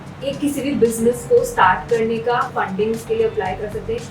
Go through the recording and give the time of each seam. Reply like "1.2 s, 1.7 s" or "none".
2.5 s